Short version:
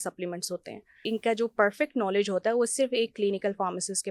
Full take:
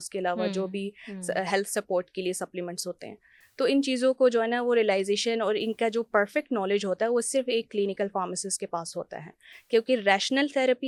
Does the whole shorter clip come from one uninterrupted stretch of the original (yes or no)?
no